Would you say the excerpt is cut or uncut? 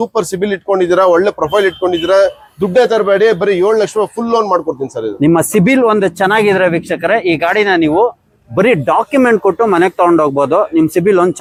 uncut